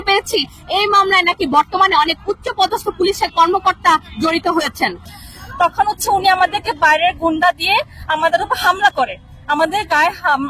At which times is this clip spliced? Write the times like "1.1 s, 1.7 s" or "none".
5.1 s